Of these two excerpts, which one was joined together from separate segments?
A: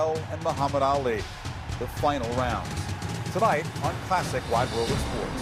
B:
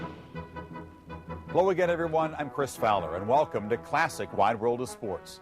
B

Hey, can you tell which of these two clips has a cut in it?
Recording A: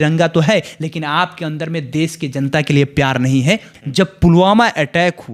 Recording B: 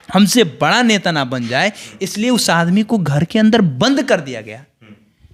A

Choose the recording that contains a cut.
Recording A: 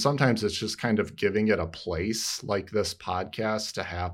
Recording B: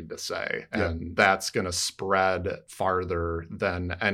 B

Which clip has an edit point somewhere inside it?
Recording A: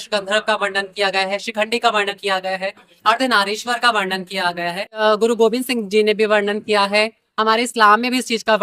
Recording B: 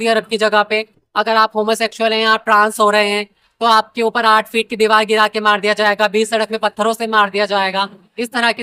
A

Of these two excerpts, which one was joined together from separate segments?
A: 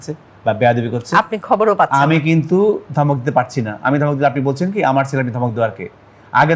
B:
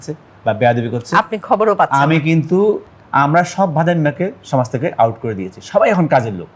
B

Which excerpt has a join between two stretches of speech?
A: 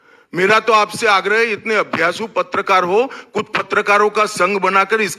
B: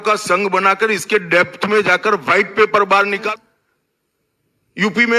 B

